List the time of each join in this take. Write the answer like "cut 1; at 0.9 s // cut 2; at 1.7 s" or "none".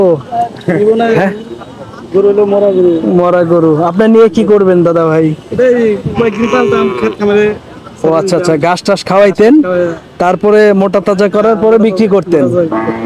none